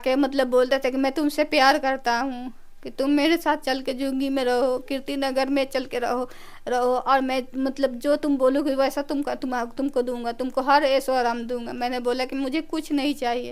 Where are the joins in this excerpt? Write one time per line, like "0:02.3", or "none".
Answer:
none